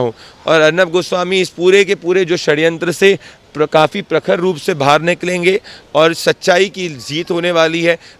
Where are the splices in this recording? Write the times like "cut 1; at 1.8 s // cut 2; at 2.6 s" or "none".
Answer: none